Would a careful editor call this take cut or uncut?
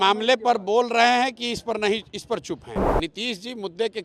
cut